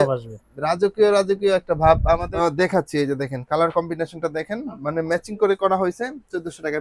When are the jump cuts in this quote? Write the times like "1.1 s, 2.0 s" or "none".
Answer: 2.3 s